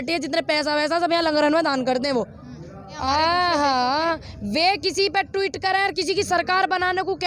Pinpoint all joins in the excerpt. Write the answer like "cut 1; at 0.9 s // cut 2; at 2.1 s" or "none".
cut 1; at 2.9 s

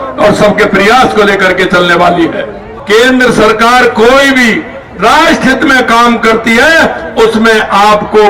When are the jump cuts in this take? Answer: cut 1; at 2.7 s

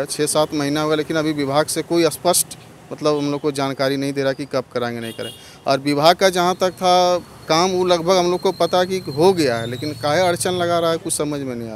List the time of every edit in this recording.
none

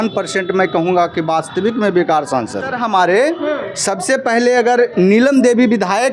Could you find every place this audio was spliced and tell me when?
cut 1; at 2.7 s

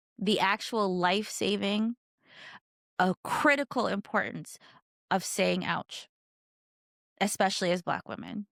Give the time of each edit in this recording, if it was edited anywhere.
none

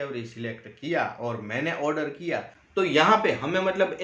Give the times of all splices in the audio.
cut 1; at 2.6 s

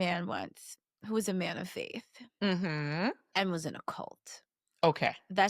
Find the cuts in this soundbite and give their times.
none

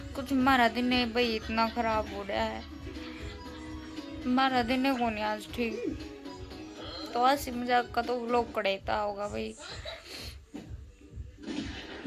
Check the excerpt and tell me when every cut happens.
none

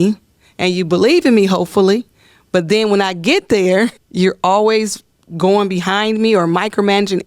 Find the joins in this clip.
cut 1; at 4.0 s

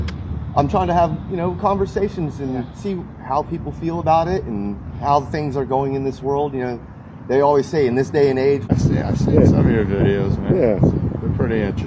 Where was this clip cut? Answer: cut 1; at 8.7 s

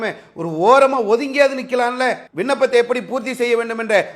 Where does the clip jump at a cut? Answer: cut 1; at 2.2 s

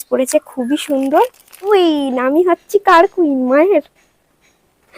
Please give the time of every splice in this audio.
cut 1; at 1.7 s

